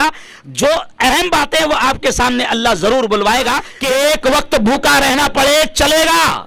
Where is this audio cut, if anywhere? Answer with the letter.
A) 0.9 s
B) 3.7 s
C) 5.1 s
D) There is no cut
B